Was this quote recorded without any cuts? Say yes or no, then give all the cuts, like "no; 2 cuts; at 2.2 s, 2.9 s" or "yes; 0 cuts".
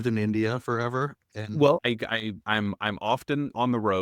no; 1 cut; at 1.8 s